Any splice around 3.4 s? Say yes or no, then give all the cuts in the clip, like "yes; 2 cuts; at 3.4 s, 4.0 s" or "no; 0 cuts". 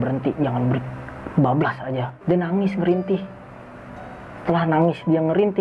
no; 1 cut; at 2.1 s